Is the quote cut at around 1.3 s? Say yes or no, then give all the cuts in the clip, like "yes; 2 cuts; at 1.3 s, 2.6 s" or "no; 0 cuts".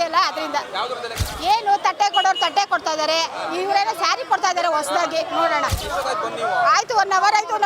yes; 2 cuts; at 1.3 s, 5.8 s